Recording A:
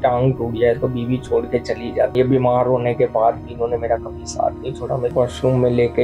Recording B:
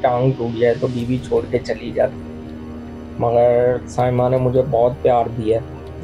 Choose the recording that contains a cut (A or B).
A